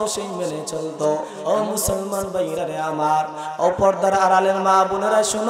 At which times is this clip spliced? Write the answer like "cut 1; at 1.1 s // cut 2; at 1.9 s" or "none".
cut 1; at 1.3 s